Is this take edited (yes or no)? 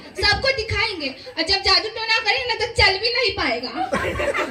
no